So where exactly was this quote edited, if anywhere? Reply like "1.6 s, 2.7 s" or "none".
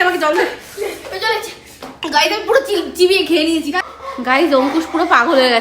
3.9 s